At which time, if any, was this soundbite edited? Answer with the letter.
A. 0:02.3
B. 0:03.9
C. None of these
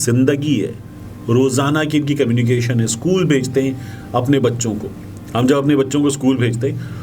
C